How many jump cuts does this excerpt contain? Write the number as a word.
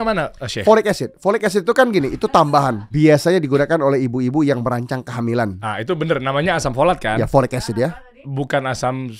two